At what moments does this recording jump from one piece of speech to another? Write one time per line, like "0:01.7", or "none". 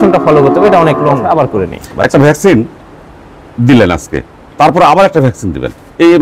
0:01.2